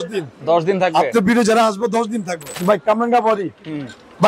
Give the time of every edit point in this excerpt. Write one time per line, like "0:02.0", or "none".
0:02.5